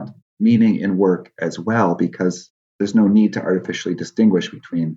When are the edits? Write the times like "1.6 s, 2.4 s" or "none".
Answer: none